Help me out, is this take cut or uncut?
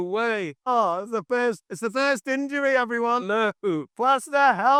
uncut